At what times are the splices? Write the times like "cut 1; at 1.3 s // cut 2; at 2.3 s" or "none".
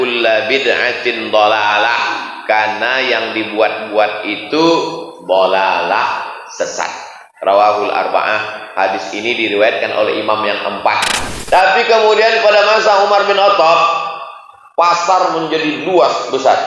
cut 1; at 11.2 s